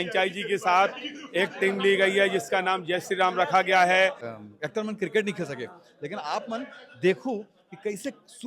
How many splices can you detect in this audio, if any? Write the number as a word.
one